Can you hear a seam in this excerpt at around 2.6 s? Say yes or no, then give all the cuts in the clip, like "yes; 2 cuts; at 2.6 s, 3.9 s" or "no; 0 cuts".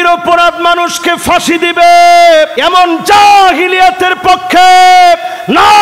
yes; 1 cut; at 2.6 s